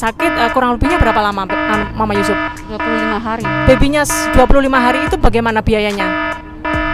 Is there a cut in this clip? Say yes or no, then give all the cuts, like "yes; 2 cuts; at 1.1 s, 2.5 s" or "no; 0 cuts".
yes; 1 cut; at 3.5 s